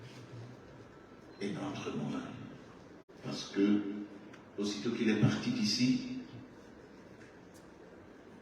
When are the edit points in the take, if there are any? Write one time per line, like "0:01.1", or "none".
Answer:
0:01.1